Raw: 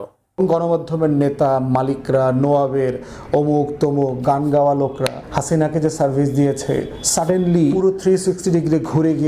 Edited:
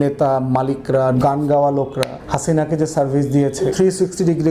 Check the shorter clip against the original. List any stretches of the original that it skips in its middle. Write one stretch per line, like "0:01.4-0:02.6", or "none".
0:02.4-0:04.2
0:06.7-0:07.9